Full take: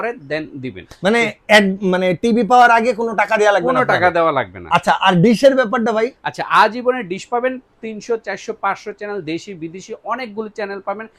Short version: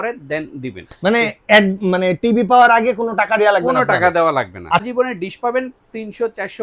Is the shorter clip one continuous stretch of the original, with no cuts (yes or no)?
no